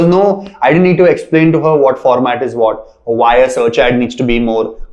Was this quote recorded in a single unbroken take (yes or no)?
yes